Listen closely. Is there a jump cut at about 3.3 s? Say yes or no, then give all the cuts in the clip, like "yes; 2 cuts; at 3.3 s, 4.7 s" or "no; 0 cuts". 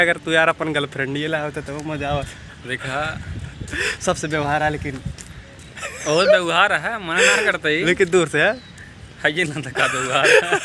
no; 0 cuts